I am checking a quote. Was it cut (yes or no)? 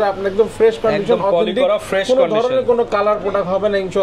no